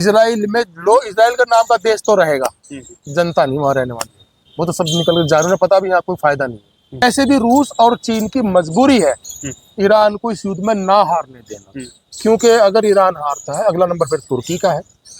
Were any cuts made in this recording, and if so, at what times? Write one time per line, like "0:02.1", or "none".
0:07.0